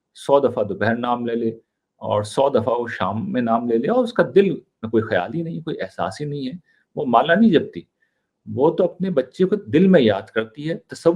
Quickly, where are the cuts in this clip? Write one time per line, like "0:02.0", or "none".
none